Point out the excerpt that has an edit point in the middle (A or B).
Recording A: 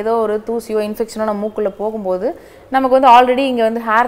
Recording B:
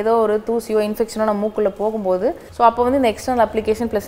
B